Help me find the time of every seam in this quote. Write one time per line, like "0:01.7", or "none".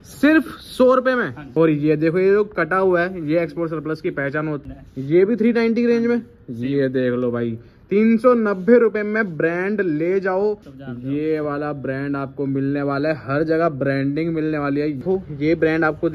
0:01.4
0:04.6
0:10.7
0:15.0